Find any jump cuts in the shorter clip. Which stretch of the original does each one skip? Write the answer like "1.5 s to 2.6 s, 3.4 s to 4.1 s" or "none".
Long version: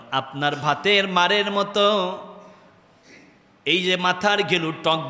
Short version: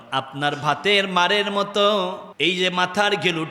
2.3 s to 3.5 s